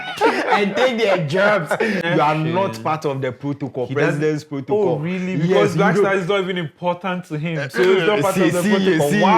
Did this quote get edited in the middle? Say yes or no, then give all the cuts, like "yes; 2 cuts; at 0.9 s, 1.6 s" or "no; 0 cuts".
yes; 1 cut; at 2.0 s